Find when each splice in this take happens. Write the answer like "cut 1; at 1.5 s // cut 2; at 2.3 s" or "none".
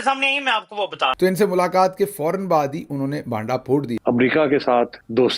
cut 1; at 1.1 s // cut 2; at 4.0 s